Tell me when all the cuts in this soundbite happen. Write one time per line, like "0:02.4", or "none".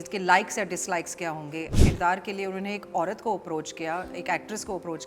0:01.7